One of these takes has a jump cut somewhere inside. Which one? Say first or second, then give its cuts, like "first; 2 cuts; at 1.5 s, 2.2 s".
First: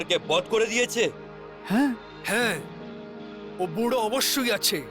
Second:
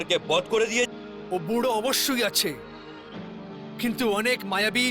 second; 1 cut; at 0.9 s